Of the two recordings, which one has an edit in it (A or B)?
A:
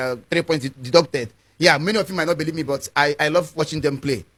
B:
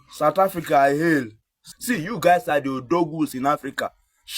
B